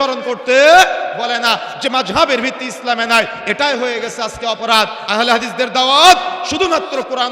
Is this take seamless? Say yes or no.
no